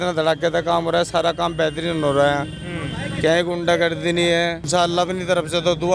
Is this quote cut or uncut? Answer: cut